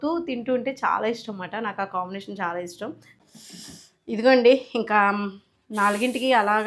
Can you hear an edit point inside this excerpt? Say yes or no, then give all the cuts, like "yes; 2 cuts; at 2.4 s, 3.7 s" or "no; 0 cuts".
yes; 1 cut; at 3.1 s